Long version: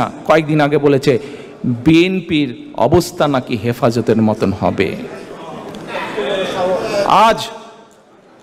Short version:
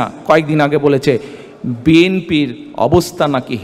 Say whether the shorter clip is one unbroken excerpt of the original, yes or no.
yes